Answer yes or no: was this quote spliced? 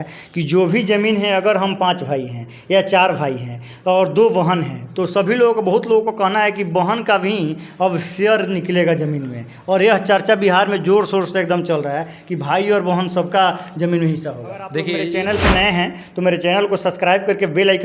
yes